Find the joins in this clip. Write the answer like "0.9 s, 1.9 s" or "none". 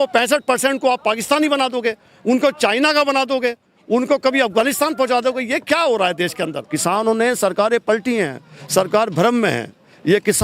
6.6 s